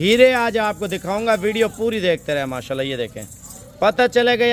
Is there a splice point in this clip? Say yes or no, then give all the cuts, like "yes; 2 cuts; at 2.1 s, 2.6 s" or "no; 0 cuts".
no; 0 cuts